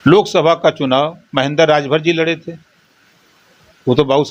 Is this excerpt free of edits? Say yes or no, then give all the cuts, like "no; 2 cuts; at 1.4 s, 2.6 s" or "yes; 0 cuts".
yes; 0 cuts